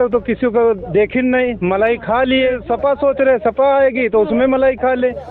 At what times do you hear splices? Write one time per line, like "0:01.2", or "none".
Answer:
0:02.6

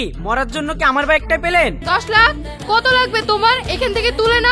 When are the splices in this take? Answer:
0:01.8

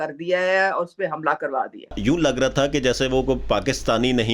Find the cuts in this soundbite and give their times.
0:02.0

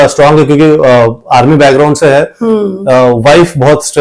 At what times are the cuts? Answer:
none

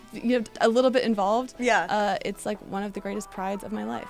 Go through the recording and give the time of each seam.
none

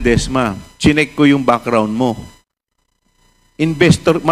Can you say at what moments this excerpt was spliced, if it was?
none

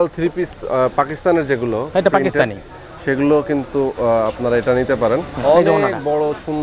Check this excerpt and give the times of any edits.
0:05.3

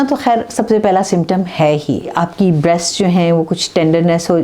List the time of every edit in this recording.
0:02.1

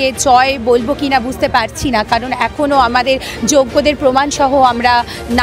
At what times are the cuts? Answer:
none

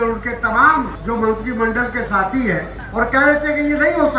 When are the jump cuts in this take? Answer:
0:01.0
0:02.8

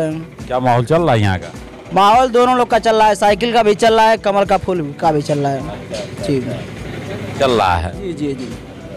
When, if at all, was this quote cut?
none

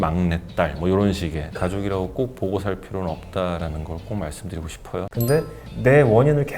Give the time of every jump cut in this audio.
0:01.4
0:05.1

